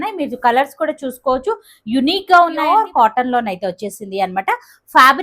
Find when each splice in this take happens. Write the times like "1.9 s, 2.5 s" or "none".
2.7 s